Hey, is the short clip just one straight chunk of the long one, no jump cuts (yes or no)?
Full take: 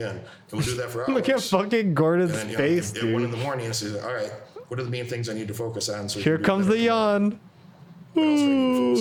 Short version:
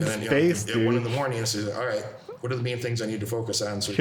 yes